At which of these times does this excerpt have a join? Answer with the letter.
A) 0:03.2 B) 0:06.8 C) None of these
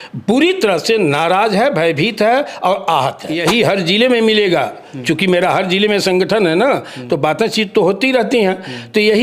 A